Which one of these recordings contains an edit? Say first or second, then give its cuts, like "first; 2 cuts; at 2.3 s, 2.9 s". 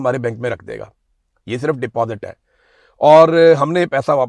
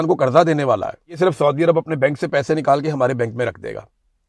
second; 1 cut; at 1.2 s